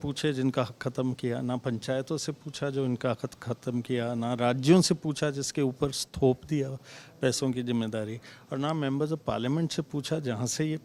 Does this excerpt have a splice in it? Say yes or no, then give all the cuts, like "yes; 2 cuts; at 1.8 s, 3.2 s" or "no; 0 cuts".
no; 0 cuts